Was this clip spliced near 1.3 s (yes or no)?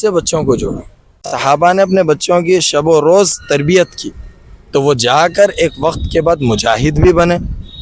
yes